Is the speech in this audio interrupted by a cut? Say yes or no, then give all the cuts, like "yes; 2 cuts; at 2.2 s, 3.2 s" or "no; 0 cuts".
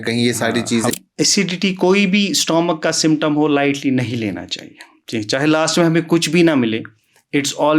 yes; 1 cut; at 0.9 s